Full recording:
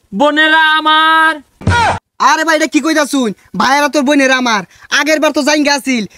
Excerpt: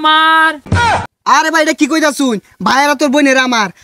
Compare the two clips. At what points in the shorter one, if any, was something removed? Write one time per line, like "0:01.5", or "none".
0:01.0